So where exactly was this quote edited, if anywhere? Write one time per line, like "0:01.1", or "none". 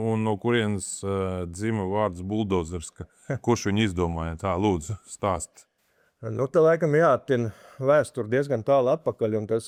none